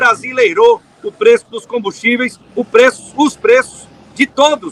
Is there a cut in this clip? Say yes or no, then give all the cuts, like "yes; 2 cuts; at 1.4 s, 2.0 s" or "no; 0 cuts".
no; 0 cuts